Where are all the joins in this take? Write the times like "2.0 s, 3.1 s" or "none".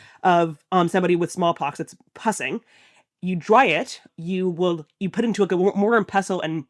4.0 s